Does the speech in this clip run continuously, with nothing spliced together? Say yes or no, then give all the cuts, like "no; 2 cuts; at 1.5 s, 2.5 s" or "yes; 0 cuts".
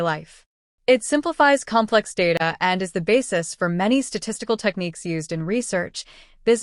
no; 1 cut; at 3.0 s